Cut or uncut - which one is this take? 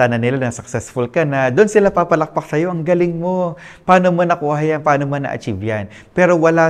uncut